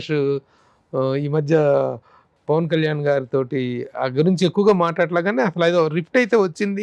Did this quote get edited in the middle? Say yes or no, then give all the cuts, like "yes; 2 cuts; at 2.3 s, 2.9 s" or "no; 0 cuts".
no; 0 cuts